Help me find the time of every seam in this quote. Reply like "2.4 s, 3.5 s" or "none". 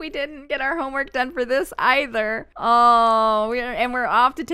none